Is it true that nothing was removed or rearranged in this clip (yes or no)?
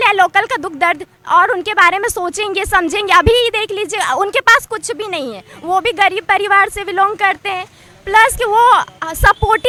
yes